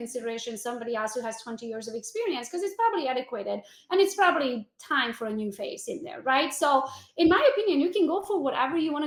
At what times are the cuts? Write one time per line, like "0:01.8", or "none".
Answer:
none